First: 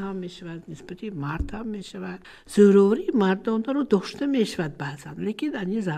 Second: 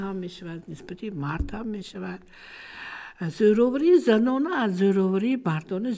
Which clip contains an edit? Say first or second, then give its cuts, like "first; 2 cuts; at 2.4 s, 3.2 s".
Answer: first; 1 cut; at 2.3 s